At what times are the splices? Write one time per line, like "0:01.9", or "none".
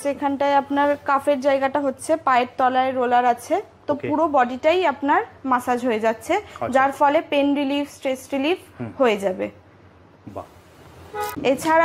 none